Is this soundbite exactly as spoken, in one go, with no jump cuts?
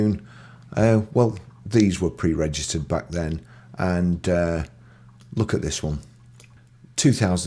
yes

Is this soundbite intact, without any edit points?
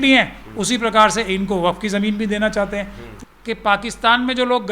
no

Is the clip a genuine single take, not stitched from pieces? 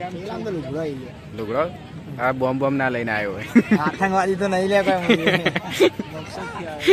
yes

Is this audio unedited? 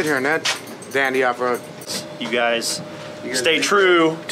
no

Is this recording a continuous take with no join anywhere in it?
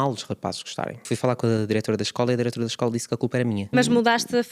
no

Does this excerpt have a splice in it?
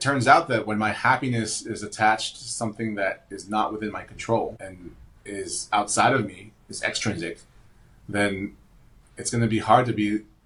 no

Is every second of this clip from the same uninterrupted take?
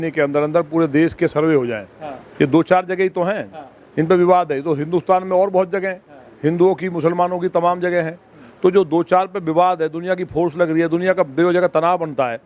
yes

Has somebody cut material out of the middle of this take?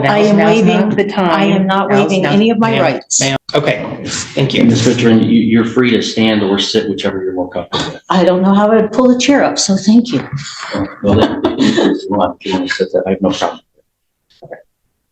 no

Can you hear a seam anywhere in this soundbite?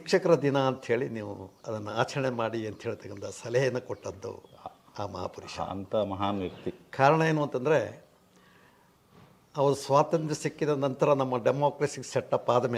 no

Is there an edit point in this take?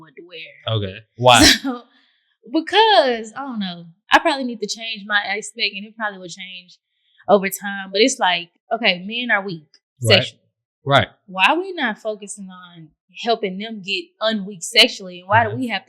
yes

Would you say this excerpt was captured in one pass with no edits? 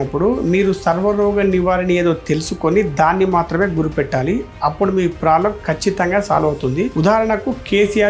yes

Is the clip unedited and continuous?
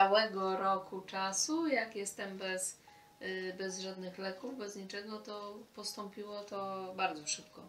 yes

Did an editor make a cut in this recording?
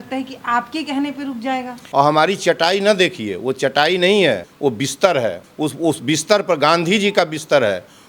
yes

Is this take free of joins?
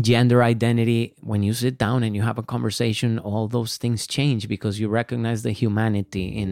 no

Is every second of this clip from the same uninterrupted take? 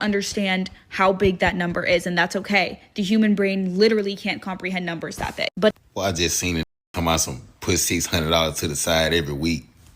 no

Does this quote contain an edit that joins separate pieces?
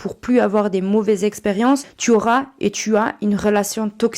yes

